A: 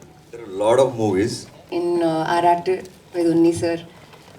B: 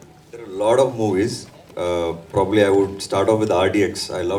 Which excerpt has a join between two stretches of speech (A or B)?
A